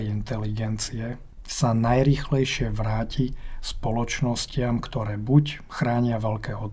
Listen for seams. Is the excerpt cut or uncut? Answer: uncut